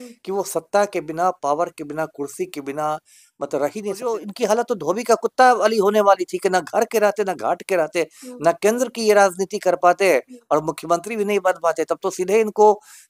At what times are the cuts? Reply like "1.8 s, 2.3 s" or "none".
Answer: 4.0 s